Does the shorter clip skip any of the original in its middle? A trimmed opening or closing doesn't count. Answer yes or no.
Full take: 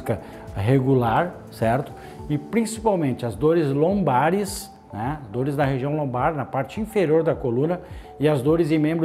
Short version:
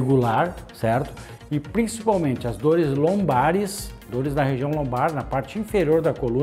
yes